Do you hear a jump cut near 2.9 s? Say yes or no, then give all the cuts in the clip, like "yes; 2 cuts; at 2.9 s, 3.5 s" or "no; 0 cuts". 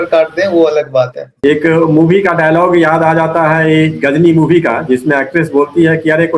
no; 1 cut; at 1.2 s